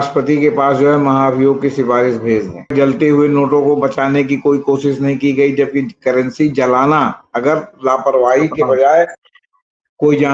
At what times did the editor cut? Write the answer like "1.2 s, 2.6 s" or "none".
2.7 s